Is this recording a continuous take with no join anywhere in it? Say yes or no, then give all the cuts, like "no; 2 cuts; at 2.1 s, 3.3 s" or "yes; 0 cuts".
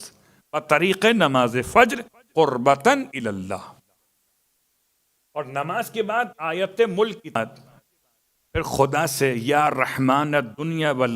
no; 1 cut; at 7.4 s